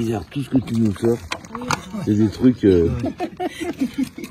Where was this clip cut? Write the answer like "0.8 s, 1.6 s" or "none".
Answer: none